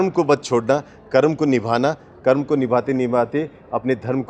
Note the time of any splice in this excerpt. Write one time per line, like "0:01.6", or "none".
none

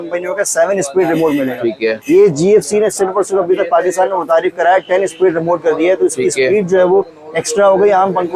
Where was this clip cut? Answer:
none

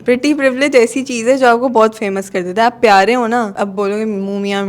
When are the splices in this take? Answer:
0:03.6

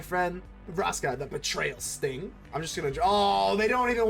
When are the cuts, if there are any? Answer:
0:02.4

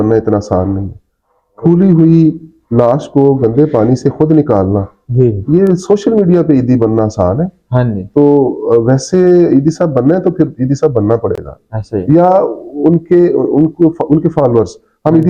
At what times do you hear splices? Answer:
none

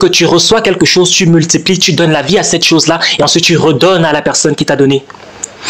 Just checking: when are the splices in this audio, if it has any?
none

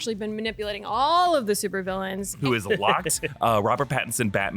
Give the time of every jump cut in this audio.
0:02.3

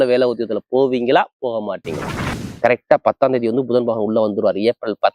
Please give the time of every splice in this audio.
0:02.4

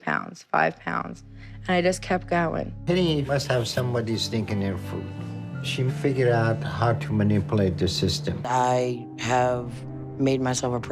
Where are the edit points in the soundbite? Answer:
0:02.8
0:08.3

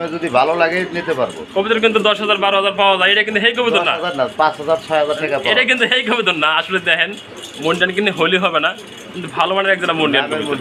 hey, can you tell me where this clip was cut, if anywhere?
none

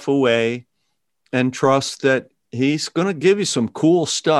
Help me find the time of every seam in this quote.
0:02.4

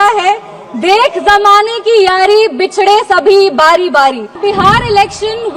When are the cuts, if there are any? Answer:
0:04.4

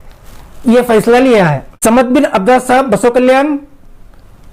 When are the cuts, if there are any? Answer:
0:01.7

